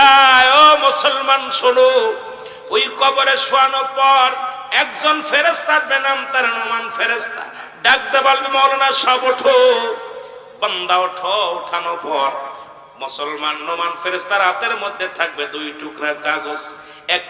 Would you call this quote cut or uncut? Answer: uncut